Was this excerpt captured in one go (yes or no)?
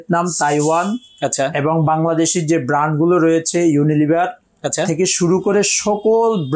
yes